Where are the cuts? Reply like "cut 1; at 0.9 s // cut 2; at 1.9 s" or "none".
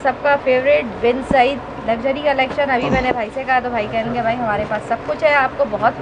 none